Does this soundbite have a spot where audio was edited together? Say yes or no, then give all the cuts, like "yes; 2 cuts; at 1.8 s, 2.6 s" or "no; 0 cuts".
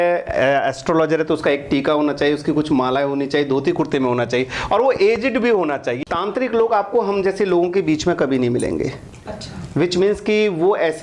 yes; 1 cut; at 5.9 s